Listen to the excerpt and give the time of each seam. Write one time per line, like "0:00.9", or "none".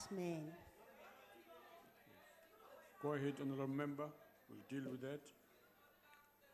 0:04.3